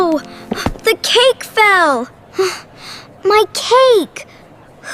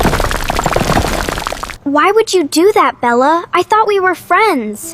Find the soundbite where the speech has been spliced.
second; 1 cut; at 1.7 s

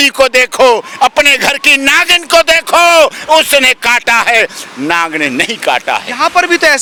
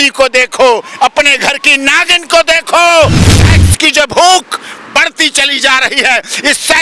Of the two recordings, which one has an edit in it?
second; 1 cut; at 3.2 s

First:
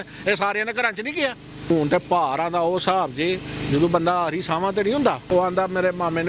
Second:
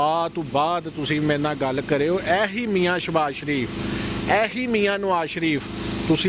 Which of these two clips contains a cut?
first; 2 cuts; at 1.7 s, 5.3 s

